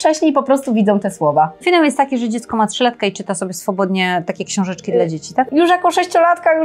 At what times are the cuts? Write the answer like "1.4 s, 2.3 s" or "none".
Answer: 1.6 s, 5.5 s